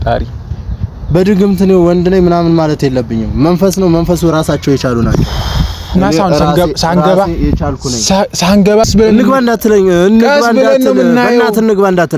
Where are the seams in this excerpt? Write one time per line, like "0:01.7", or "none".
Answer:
0:08.9